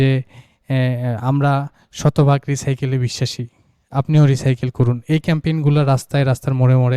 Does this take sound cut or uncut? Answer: uncut